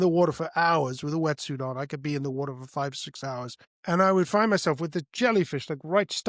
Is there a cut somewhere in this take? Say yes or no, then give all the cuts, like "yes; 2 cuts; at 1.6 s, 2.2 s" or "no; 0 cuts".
yes; 1 cut; at 3.6 s